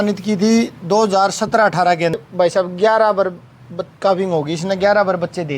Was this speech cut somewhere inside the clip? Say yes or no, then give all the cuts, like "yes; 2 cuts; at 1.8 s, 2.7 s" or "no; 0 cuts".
yes; 1 cut; at 2.2 s